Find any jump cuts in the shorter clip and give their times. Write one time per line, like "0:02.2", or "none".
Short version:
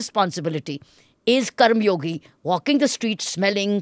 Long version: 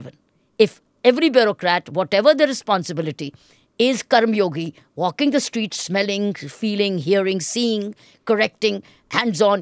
none